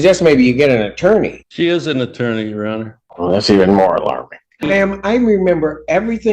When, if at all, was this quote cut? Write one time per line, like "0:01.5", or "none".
0:01.4
0:03.0
0:04.7